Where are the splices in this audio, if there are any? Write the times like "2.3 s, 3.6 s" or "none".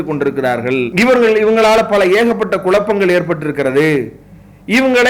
none